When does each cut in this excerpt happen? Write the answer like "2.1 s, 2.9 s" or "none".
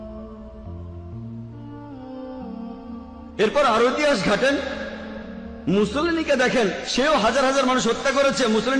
3.3 s